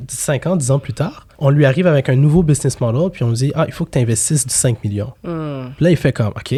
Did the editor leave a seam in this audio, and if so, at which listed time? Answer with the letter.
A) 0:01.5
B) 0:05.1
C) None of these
C